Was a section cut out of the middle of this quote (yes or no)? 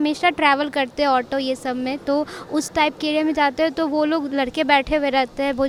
no